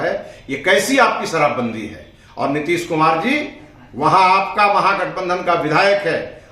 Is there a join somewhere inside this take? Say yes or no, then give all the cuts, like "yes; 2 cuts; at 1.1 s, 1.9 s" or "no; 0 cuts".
no; 0 cuts